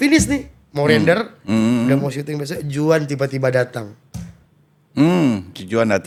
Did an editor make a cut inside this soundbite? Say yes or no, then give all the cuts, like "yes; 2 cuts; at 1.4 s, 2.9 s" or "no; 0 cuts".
no; 0 cuts